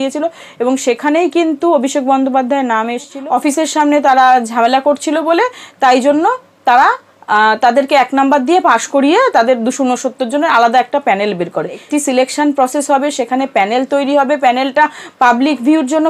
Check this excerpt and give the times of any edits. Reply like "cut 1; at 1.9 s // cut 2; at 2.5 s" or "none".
cut 1; at 3.1 s // cut 2; at 11.8 s

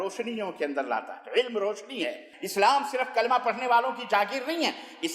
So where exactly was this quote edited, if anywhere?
cut 1; at 2.3 s

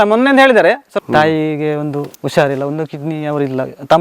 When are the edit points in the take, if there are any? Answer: cut 1; at 0.9 s // cut 2; at 2.2 s

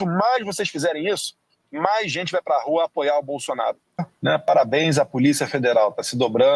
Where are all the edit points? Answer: cut 1; at 4.1 s

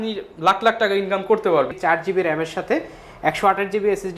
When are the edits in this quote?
cut 1; at 1.8 s

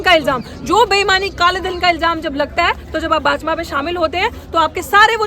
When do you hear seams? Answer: none

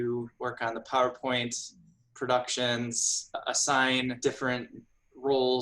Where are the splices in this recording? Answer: cut 1; at 3.4 s // cut 2; at 4.2 s

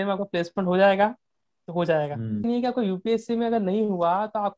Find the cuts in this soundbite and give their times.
cut 1; at 2.4 s

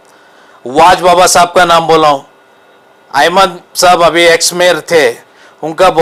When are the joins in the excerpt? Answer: none

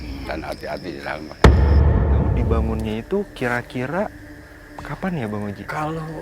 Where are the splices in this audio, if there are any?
cut 1; at 2.4 s

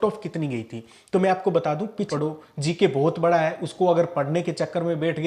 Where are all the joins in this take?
cut 1; at 2.1 s

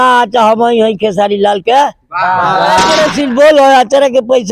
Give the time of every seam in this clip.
cut 1; at 3.0 s

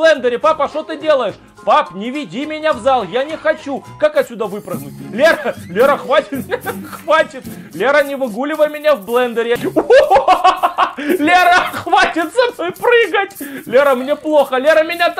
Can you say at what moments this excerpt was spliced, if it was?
cut 1; at 9.6 s

